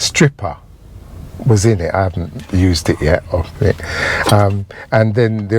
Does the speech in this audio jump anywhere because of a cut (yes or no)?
no